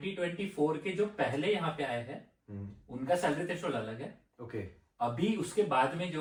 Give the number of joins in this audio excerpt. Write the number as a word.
zero